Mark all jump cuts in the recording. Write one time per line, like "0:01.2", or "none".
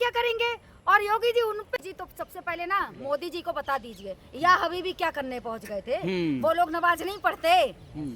0:01.8